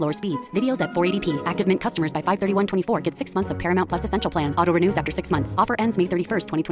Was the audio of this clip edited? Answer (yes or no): no